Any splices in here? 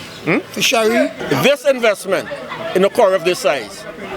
yes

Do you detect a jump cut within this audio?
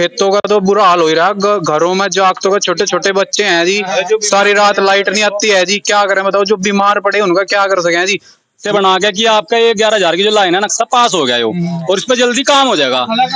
yes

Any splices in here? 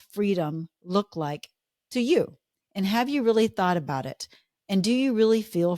no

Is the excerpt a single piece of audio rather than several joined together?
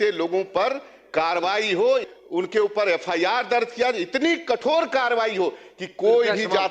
no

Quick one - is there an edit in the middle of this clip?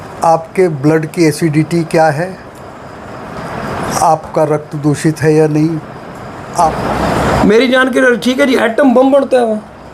yes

